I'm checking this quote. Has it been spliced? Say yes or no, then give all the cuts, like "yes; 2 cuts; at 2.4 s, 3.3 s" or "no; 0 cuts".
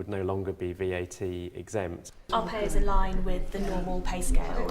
yes; 1 cut; at 2.2 s